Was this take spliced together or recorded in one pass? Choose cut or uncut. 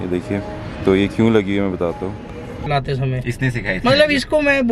cut